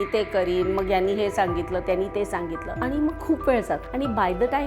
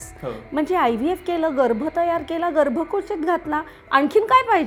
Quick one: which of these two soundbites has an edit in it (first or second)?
first